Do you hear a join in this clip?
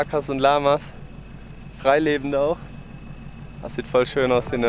no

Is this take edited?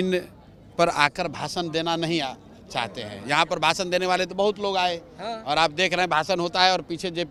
no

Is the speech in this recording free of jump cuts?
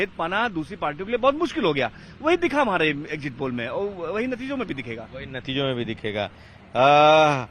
yes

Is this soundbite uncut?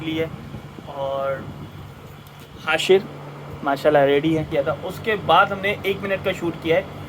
no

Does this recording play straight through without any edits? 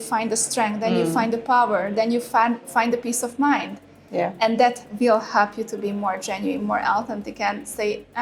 yes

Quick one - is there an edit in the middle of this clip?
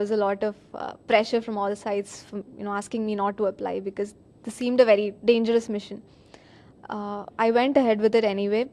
yes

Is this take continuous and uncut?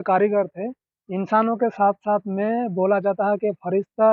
yes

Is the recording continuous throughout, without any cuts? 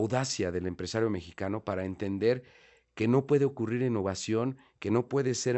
yes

